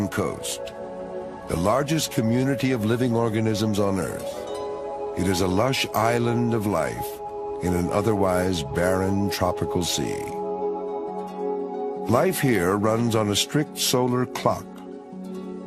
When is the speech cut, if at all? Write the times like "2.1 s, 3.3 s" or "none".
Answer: none